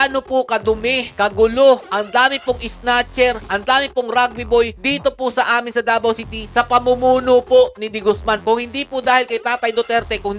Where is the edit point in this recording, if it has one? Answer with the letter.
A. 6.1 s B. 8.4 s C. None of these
B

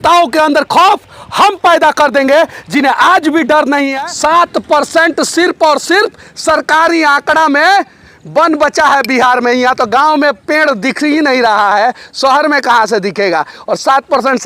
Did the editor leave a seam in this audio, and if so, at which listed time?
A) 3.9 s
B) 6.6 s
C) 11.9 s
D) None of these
A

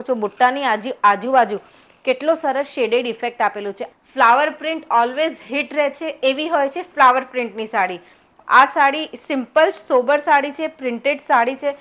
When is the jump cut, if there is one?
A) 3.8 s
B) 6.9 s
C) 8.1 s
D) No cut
A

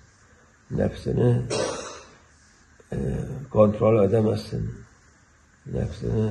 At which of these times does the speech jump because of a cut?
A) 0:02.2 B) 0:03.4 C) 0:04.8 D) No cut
C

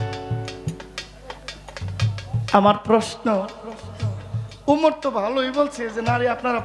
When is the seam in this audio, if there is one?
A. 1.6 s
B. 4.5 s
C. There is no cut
C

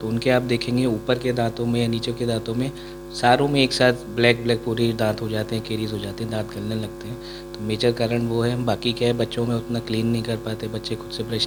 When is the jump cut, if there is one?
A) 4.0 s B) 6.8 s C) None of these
C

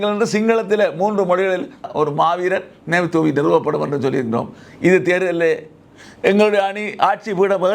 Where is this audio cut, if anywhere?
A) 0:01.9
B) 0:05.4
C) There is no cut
A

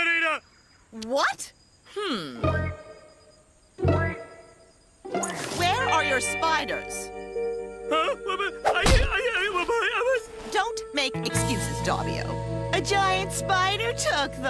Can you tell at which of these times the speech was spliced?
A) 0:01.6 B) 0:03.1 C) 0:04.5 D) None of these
C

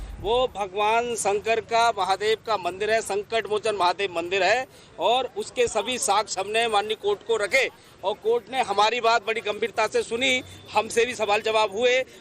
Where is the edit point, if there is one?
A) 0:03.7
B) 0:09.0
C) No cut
B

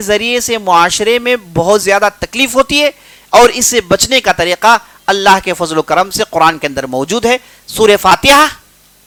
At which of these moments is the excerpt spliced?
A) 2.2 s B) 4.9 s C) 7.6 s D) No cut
D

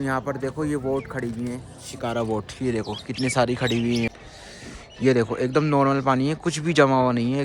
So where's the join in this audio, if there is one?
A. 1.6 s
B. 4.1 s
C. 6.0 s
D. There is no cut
B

